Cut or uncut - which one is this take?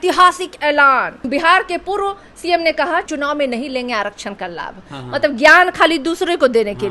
uncut